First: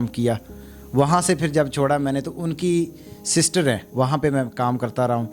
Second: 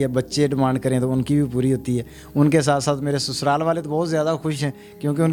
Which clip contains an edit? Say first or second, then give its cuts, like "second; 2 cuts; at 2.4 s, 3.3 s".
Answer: first; 1 cut; at 3.9 s